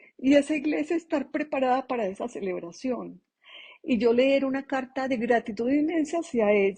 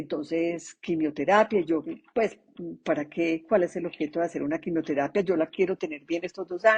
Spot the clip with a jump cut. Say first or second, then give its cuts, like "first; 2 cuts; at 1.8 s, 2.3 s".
second; 1 cut; at 1.9 s